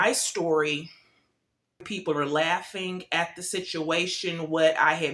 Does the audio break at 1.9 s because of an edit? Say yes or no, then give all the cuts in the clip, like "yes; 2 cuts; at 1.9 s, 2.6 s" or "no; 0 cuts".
yes; 1 cut; at 1.9 s